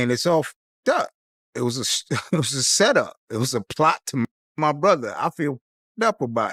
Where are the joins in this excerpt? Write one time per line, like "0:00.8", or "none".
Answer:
none